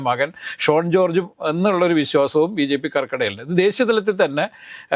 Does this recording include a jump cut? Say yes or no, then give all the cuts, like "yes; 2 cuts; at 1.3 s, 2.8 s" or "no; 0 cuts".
no; 0 cuts